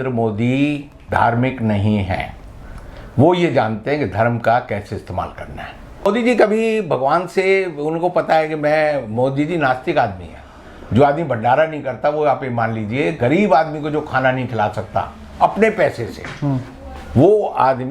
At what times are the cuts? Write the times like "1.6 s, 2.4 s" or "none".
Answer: 6.1 s